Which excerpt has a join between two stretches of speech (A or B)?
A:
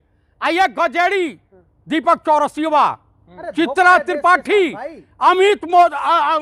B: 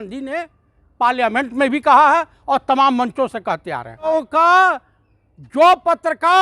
B